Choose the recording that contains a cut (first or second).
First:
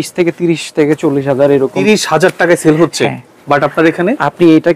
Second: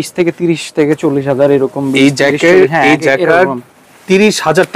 first